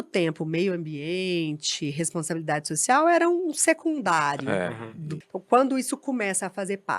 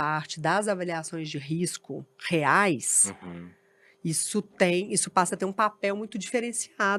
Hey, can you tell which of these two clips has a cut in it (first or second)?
first